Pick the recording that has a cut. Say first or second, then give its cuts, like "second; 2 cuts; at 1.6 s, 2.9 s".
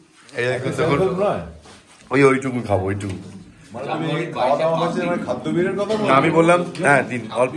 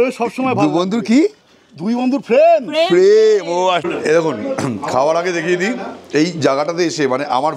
second; 1 cut; at 3.8 s